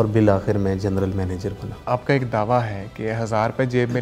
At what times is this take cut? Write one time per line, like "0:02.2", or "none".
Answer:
0:01.7